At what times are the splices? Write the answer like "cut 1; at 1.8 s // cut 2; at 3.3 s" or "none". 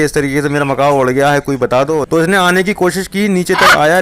cut 1; at 2.0 s